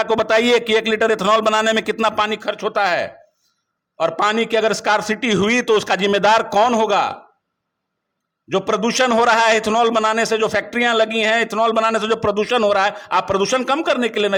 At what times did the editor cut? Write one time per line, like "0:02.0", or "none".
none